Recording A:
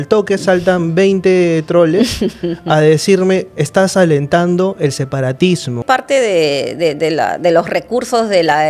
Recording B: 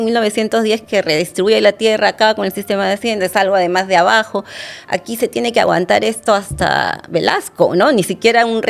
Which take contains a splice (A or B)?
A